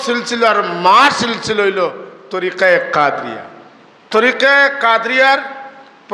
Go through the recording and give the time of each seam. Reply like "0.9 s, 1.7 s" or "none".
4.1 s